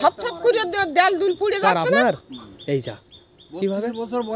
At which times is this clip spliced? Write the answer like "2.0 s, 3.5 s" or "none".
none